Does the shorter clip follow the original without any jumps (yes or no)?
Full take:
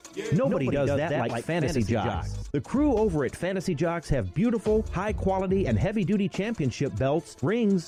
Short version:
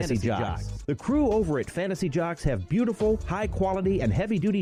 yes